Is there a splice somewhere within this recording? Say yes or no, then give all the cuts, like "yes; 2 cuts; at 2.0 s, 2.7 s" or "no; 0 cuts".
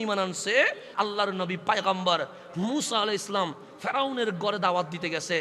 yes; 1 cut; at 0.9 s